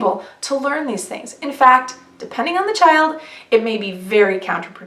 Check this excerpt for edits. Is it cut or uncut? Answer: uncut